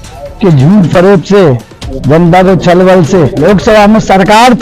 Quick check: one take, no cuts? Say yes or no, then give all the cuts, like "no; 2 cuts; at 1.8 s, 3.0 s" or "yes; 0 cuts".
no; 1 cut; at 3.3 s